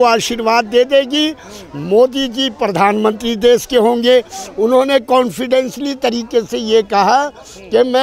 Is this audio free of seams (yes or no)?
yes